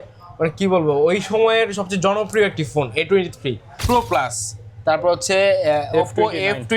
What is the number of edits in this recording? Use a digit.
1